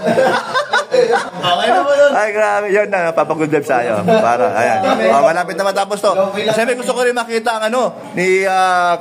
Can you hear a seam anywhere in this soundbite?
yes; 1 cut; at 1.2 s

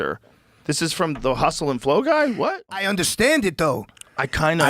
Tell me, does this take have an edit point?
yes; 1 cut; at 2.8 s

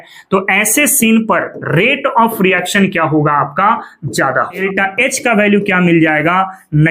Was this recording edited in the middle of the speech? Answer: yes; 1 cut; at 4.6 s

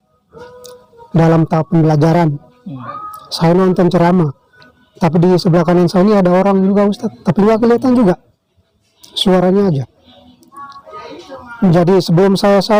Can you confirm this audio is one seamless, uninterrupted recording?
yes; 0 cuts

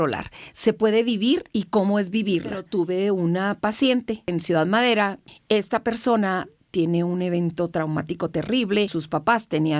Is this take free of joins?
no; 4 cuts; at 2.6 s, 4.3 s, 5.3 s, 9.0 s

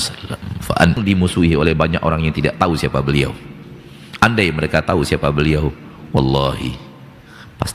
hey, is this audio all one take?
no; 1 cut; at 1.0 s

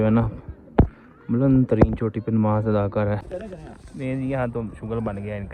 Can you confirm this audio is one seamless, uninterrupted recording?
no; 1 cut; at 3.2 s

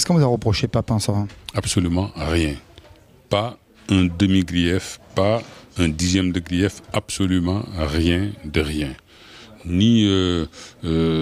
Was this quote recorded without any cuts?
no; 1 cut; at 6.4 s

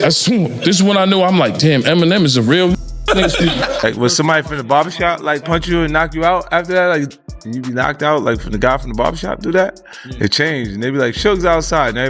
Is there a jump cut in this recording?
yes; 1 cut; at 3.8 s

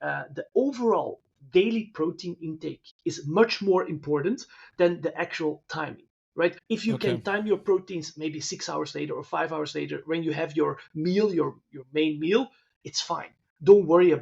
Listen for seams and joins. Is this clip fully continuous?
no; 1 cut; at 6.6 s

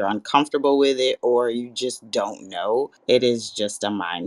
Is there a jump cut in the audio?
yes; 1 cut; at 3.0 s

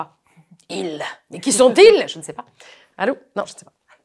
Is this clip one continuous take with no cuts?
yes; 0 cuts

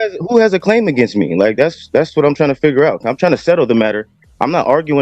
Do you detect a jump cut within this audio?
no; 0 cuts

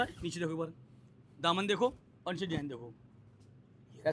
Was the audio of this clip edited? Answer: no; 0 cuts

